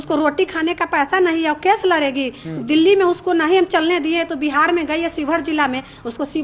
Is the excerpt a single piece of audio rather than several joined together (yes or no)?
yes